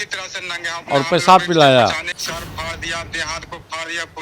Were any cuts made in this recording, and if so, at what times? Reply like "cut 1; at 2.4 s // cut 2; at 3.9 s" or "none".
cut 1; at 2.1 s